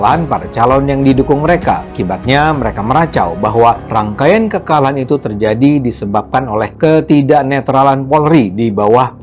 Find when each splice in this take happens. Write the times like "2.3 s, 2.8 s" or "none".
none